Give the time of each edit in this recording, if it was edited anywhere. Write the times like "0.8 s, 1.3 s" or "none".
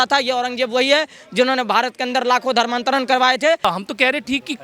3.7 s